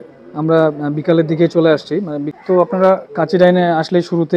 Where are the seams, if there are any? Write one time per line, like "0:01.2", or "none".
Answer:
0:02.2